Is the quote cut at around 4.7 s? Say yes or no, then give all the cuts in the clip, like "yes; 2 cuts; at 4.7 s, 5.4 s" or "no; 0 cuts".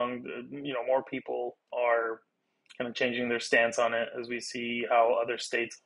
no; 1 cut; at 1.7 s